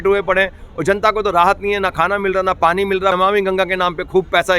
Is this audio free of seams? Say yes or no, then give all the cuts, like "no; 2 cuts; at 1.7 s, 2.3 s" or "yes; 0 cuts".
no; 1 cut; at 3.1 s